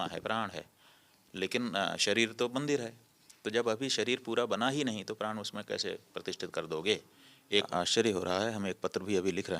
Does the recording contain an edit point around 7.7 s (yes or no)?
yes